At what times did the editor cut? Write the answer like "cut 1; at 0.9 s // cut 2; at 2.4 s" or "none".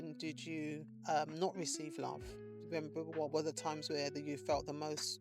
cut 1; at 0.9 s